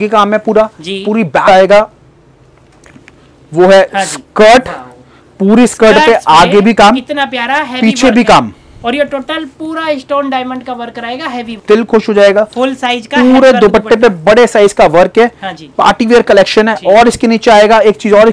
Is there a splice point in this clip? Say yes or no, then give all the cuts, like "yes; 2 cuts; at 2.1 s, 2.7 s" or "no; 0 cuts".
yes; 2 cuts; at 1.5 s, 11.6 s